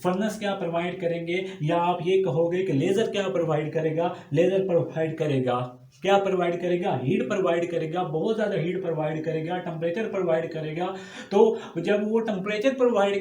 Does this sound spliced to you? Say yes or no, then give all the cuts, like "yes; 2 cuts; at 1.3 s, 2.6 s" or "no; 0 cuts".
no; 0 cuts